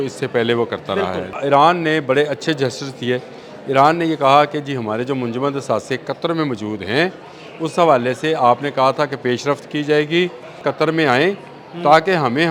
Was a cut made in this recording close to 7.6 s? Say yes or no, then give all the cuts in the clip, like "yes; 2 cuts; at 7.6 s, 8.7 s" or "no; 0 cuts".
no; 2 cuts; at 1.4 s, 10.7 s